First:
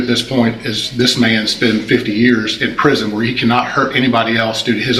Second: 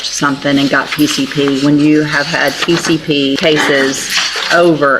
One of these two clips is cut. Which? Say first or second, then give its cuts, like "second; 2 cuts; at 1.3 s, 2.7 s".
second; 1 cut; at 3.4 s